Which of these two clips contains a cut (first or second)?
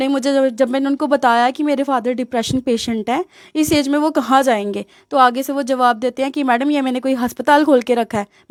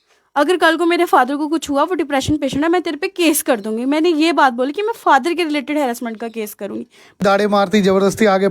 second